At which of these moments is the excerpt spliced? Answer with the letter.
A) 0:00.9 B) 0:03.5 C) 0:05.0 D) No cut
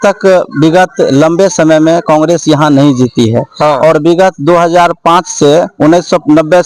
D